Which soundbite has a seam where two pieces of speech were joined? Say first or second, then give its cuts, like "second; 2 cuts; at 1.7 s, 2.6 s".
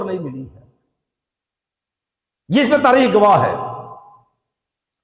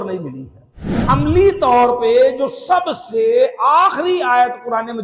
second; 1 cut; at 1.0 s